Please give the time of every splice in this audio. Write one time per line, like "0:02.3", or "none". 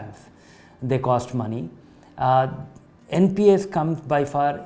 none